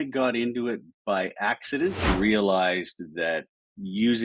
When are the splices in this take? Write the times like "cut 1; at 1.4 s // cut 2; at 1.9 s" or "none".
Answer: cut 1; at 2.0 s